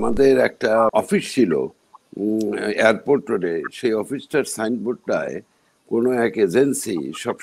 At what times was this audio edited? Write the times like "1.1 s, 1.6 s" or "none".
0.9 s